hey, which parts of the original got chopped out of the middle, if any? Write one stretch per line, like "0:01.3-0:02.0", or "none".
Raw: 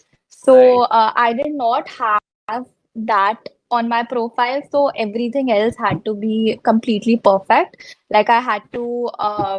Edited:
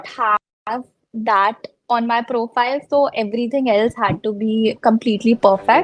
none